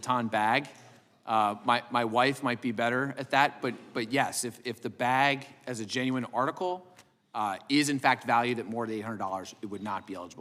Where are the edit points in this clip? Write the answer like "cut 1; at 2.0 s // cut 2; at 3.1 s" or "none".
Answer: none